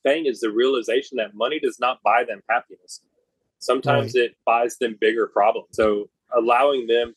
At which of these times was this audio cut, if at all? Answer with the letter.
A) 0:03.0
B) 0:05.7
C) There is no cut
B